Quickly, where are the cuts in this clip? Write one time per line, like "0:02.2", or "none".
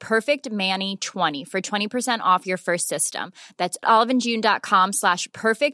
0:01.4